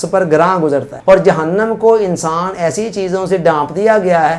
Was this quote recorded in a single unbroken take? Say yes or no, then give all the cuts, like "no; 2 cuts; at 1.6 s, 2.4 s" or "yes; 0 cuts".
no; 1 cut; at 0.9 s